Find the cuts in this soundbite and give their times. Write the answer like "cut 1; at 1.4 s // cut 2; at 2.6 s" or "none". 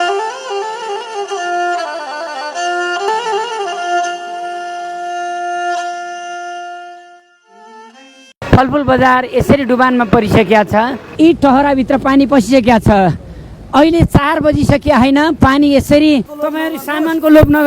cut 1; at 8.4 s // cut 2; at 16.3 s